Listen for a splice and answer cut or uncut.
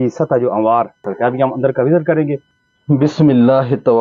cut